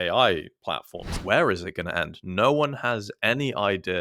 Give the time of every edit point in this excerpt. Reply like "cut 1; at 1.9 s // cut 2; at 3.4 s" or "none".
cut 1; at 1.1 s